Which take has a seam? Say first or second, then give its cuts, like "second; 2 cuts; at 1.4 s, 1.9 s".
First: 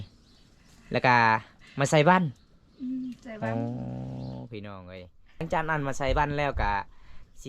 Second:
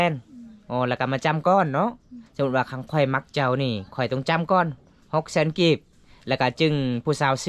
first; 1 cut; at 5.4 s